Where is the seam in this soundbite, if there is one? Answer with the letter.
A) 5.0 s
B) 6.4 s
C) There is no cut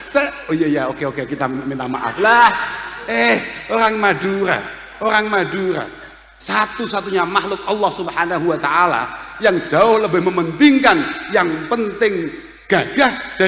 C